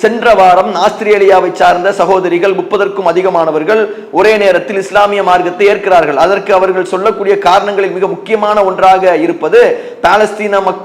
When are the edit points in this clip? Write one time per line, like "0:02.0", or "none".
none